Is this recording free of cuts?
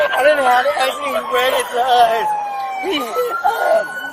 yes; 0 cuts

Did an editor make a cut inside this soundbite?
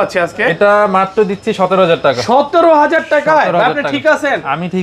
no; 0 cuts

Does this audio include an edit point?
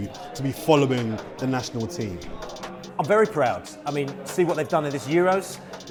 no; 0 cuts

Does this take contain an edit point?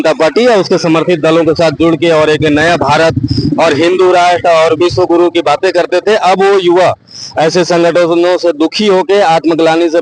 no; 0 cuts

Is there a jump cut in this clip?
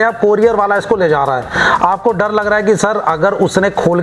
no; 0 cuts

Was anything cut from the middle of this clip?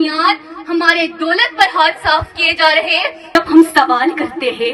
yes; 1 cut; at 3.4 s

